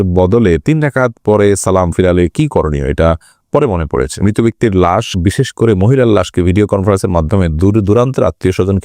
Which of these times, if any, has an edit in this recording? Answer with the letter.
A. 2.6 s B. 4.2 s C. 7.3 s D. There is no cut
B